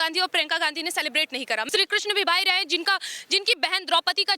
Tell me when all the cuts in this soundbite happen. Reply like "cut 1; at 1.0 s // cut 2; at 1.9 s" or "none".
cut 1; at 1.6 s